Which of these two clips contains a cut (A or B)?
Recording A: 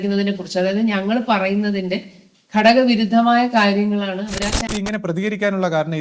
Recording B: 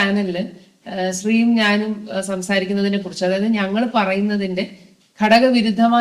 A